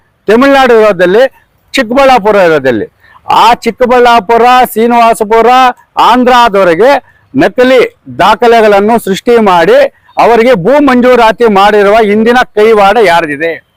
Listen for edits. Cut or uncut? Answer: uncut